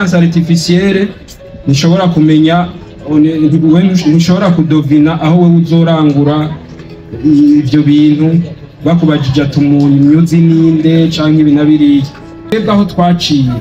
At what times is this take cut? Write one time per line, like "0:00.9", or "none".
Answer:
0:12.5